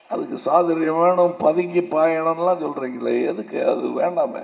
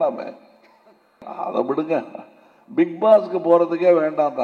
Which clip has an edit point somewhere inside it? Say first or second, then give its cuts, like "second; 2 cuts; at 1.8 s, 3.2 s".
second; 1 cut; at 1.3 s